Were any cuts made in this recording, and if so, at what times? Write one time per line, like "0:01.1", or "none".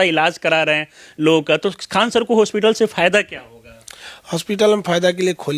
none